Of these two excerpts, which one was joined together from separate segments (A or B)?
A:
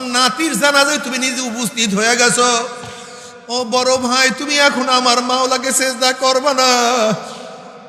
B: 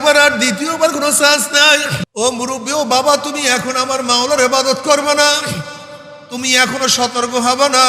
B